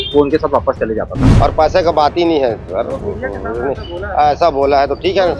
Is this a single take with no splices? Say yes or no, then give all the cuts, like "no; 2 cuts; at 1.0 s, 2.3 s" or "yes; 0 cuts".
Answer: no; 1 cut; at 1.3 s